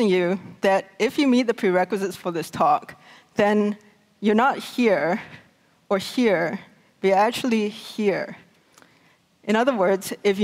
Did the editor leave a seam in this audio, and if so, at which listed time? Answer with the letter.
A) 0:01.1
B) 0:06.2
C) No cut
A